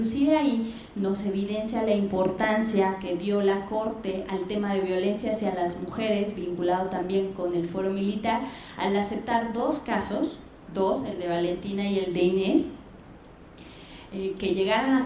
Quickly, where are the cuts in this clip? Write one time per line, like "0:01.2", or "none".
none